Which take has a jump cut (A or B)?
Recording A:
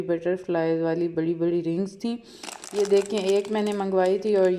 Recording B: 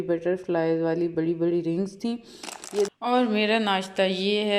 B